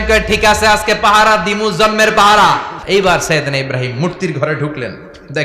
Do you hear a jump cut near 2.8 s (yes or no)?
yes